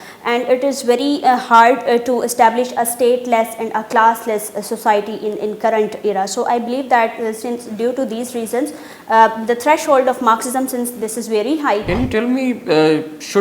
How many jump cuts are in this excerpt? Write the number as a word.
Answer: one